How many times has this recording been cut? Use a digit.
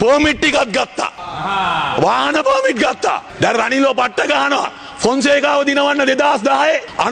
1